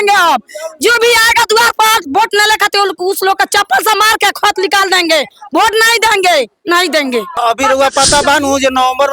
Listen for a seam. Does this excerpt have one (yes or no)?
yes